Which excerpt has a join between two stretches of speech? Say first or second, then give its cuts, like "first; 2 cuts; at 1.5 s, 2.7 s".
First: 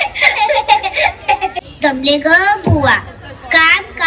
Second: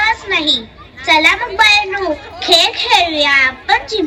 first; 1 cut; at 1.6 s